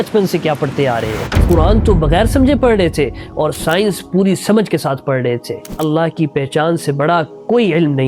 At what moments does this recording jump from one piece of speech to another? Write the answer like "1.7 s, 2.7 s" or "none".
1.4 s, 5.7 s